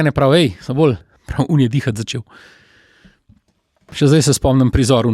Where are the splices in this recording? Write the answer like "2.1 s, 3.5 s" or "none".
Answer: 1.2 s, 3.9 s